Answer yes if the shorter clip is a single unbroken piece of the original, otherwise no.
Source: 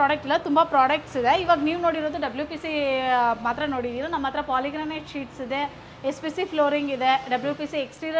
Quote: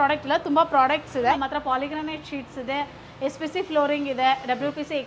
no